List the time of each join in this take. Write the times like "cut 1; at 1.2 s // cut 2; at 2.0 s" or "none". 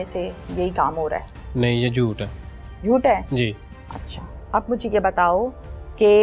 none